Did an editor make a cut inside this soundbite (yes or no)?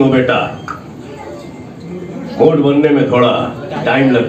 no